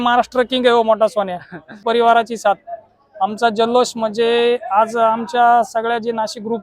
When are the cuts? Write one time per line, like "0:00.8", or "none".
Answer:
0:01.8